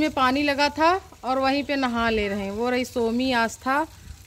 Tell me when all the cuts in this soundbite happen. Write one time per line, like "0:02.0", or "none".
none